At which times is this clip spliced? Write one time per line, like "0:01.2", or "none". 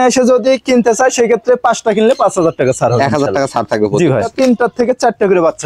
0:04.3

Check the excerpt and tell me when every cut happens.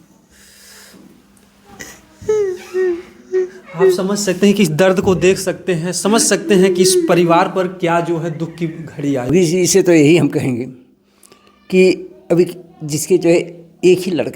0:09.3

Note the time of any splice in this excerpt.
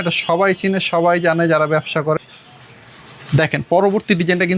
0:02.2

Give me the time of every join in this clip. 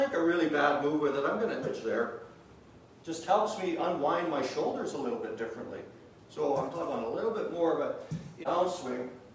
0:01.7
0:06.7
0:08.4

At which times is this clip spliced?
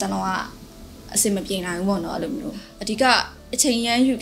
none

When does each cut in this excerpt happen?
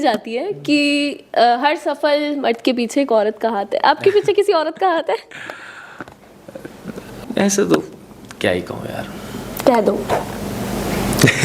0:07.2

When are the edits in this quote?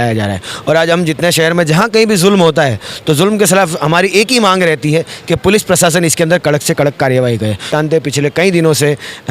0:07.7

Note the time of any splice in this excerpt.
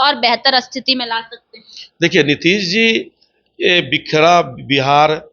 none

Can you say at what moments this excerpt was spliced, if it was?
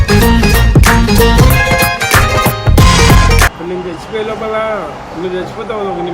0:03.6

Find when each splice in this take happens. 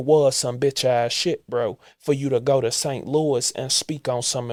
none

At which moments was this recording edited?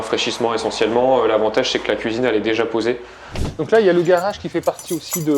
0:03.5

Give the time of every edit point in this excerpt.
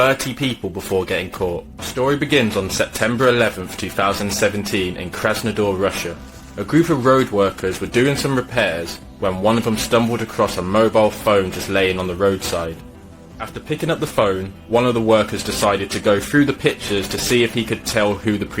0:01.8

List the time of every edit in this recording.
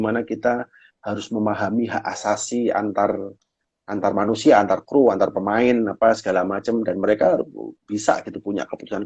none

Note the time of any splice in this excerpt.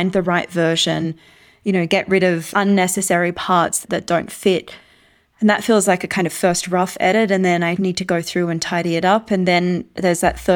0:02.5

